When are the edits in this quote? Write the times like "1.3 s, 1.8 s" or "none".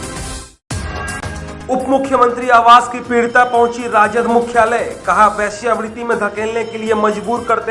1.4 s